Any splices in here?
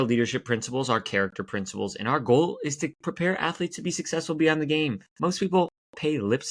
no; 0 cuts

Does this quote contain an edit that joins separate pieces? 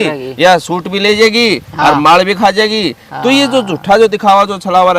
no; 0 cuts

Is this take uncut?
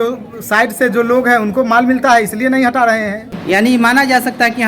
no; 1 cut; at 3.4 s

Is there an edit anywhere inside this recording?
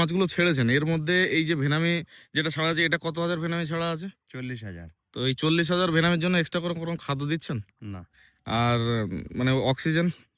no; 0 cuts

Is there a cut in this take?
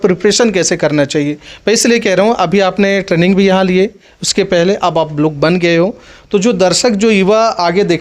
no; 0 cuts

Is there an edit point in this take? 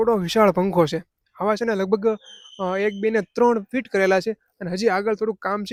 no; 0 cuts

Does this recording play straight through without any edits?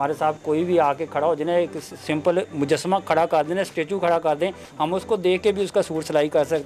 yes; 0 cuts

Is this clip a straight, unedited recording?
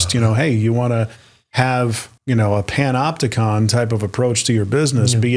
no; 1 cut; at 2.1 s

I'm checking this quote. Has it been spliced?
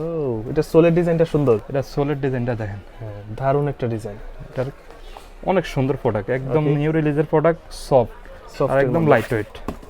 no; 0 cuts

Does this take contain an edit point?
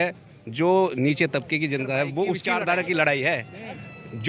yes; 1 cut; at 2.5 s

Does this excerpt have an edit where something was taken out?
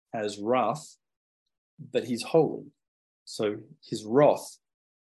no; 0 cuts

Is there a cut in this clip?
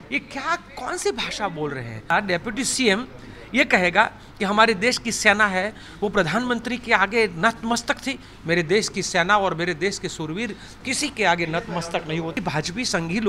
yes; 2 cuts; at 2.1 s, 12.4 s

